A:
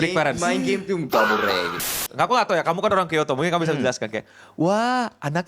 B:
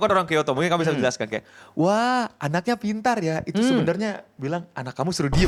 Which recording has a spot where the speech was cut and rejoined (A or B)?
A